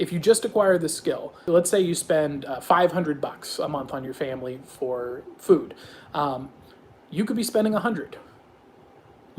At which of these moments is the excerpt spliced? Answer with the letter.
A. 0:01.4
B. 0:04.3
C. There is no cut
A